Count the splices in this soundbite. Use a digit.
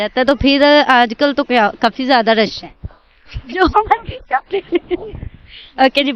1